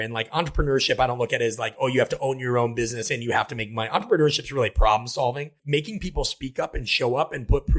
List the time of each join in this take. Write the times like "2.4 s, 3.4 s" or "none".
5.6 s